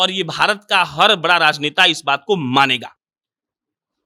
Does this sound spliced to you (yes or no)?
no